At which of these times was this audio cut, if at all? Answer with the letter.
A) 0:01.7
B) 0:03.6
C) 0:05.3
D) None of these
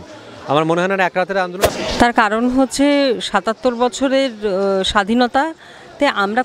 A